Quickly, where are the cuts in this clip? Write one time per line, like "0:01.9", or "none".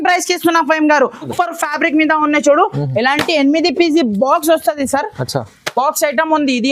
0:01.3